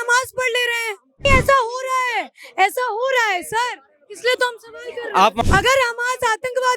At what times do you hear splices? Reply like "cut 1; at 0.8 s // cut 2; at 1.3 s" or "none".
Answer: cut 1; at 1.2 s // cut 2; at 5.4 s